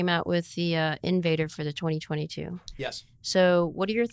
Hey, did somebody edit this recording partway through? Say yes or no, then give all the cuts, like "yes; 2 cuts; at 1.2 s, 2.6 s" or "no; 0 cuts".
no; 0 cuts